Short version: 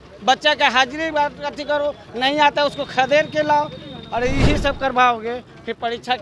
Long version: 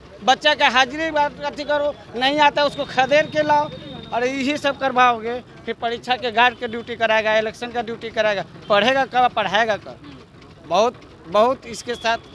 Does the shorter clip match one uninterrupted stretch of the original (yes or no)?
yes